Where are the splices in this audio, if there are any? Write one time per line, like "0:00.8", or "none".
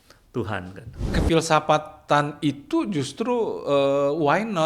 0:01.1